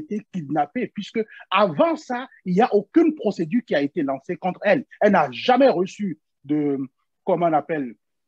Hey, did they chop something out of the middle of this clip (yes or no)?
no